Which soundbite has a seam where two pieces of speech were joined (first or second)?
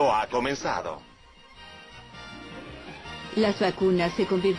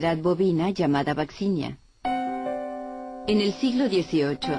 first